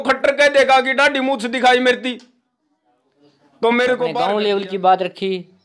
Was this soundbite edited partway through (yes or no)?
yes